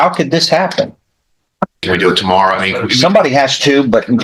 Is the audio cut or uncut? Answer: cut